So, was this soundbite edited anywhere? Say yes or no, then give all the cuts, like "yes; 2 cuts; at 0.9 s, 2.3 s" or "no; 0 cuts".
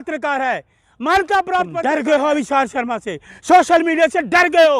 yes; 1 cut; at 1.8 s